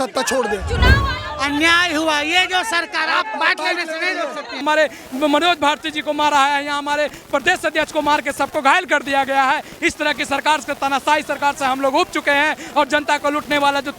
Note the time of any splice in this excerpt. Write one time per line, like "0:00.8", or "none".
0:01.0
0:04.6